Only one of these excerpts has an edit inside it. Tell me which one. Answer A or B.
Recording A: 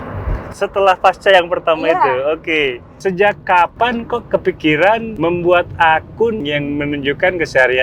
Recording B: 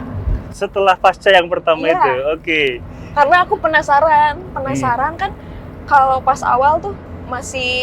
A